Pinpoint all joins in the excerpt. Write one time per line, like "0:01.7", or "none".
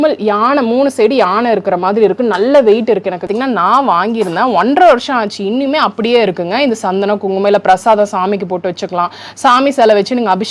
0:03.3